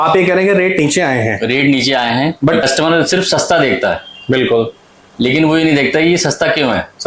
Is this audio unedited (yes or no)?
no